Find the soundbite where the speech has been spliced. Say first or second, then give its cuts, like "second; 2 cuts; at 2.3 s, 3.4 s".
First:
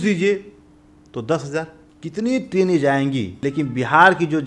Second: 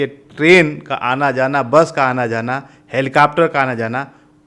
first; 2 cuts; at 1.8 s, 3.3 s